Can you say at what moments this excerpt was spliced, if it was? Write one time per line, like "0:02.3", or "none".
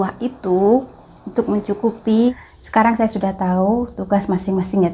0:02.4